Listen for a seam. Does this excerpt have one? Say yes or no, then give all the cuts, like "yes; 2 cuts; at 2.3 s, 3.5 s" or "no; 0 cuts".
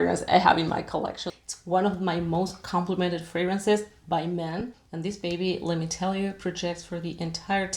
yes; 2 cuts; at 1.3 s, 4.6 s